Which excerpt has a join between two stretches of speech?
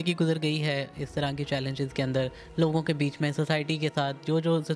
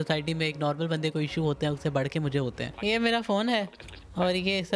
second; 1 cut; at 2.7 s

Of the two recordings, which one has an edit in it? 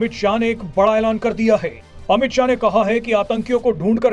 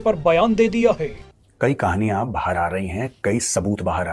second; 1 cut; at 1.3 s

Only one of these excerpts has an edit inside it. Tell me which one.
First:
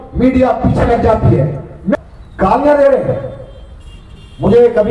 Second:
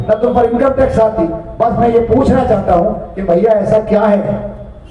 first; 1 cut; at 1.9 s

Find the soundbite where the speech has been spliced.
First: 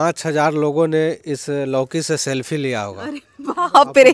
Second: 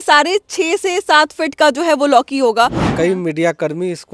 second; 1 cut; at 2.9 s

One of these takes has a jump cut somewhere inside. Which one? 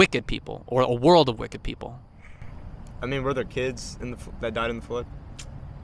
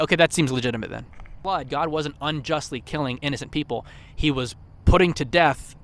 second; 1 cut; at 1.4 s

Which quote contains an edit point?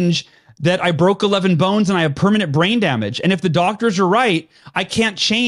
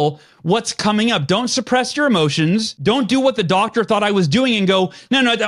second; 1 cut; at 2.7 s

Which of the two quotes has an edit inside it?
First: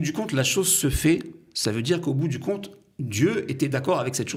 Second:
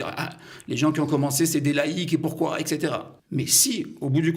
second; 1 cut; at 3.1 s

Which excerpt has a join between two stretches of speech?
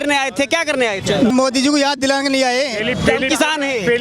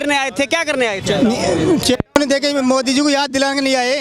first; 1 cut; at 1.3 s

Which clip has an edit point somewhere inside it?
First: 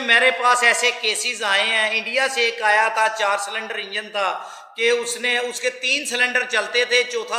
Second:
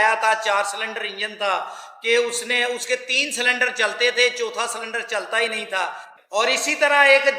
second; 1 cut; at 6.1 s

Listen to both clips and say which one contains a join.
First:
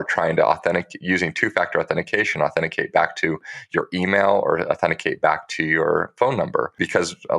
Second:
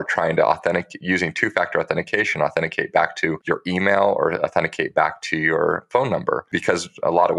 second; 1 cut; at 3.4 s

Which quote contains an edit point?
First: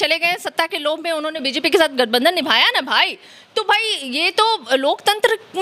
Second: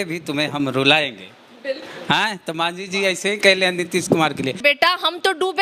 second; 1 cut; at 4.6 s

